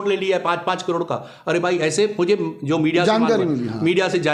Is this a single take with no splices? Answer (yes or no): yes